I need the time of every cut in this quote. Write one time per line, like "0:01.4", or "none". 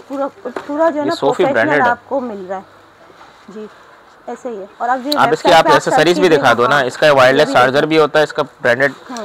none